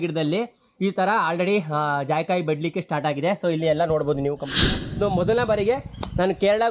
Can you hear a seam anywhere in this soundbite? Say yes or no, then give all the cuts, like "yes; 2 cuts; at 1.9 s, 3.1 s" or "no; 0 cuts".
yes; 1 cut; at 4.6 s